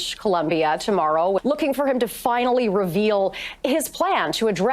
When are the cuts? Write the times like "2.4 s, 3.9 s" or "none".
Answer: 1.4 s